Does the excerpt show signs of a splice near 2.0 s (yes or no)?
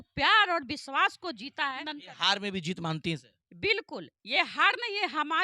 yes